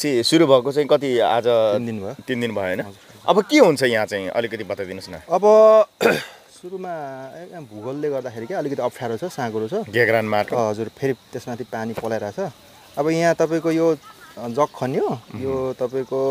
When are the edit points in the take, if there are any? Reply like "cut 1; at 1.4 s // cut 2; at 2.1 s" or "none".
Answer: none